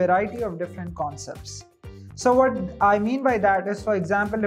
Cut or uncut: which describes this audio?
uncut